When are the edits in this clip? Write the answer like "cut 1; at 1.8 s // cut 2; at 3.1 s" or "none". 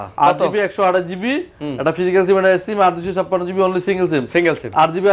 none